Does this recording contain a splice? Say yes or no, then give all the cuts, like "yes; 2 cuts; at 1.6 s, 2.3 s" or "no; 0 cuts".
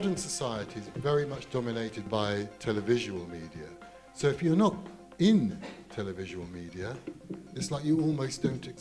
yes; 1 cut; at 2.0 s